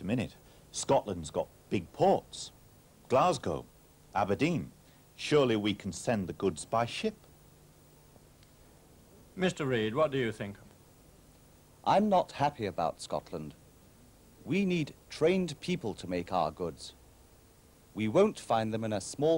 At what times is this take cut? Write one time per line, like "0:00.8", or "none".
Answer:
none